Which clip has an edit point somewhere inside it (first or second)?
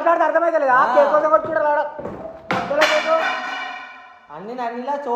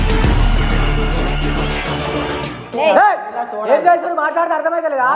second